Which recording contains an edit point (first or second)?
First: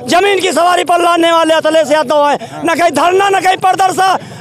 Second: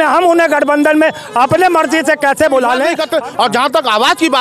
second